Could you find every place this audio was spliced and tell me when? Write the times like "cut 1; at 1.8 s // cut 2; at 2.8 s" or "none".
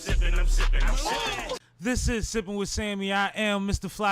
cut 1; at 1.7 s